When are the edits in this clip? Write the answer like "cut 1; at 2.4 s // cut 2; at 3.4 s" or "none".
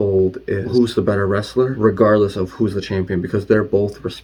none

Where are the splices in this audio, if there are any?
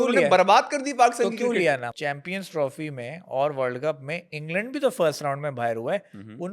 cut 1; at 1.9 s

